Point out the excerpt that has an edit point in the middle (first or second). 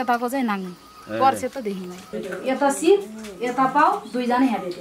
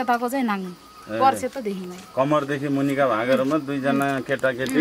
first